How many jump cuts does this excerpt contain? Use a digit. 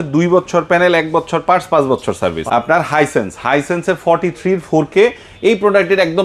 1